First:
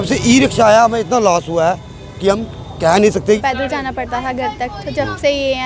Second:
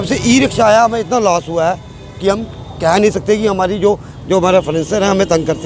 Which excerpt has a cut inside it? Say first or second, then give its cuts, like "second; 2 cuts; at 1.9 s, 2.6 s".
first; 1 cut; at 3.4 s